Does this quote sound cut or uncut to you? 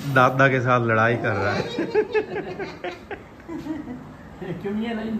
uncut